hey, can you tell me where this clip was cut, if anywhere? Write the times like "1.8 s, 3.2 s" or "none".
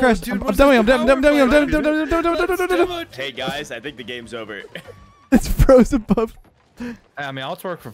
3.1 s, 7.1 s